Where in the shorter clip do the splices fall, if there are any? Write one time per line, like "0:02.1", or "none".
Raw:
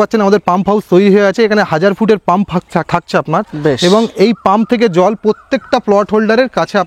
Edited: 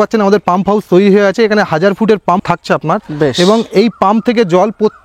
0:02.4